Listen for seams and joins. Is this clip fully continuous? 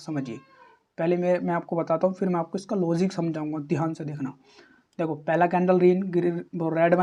yes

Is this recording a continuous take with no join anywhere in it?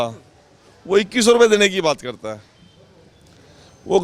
yes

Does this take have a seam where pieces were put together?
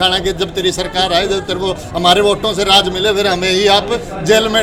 no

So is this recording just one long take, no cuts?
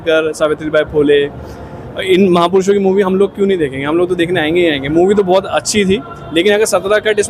yes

